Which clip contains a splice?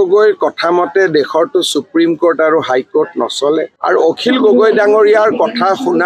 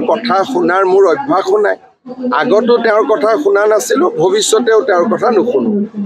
first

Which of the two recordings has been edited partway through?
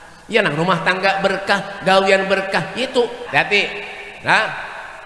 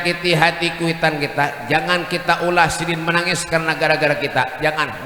first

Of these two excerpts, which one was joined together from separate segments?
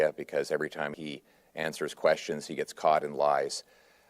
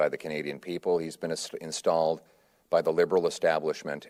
first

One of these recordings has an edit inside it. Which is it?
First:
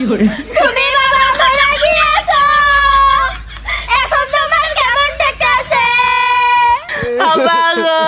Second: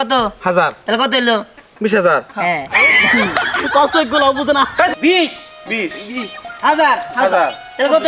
second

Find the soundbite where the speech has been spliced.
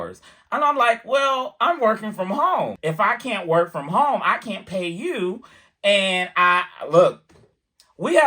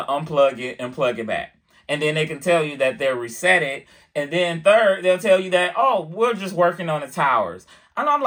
first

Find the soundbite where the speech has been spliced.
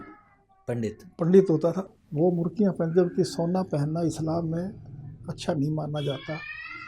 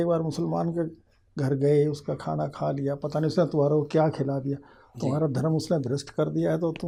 first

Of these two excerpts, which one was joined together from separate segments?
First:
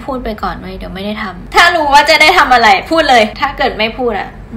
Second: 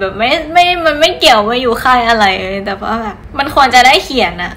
first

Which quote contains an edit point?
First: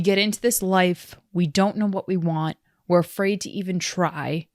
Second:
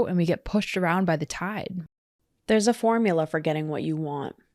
second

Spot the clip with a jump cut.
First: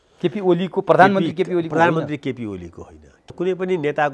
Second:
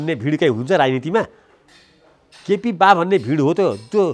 first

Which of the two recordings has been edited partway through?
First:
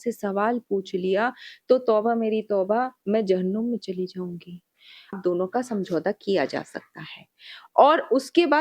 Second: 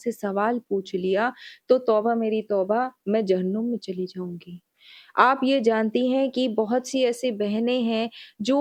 first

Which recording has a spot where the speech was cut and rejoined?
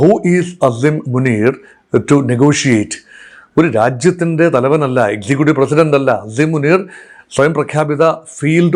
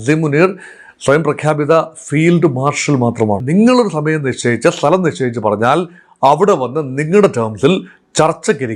second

